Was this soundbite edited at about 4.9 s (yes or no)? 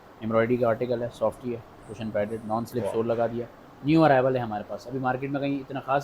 no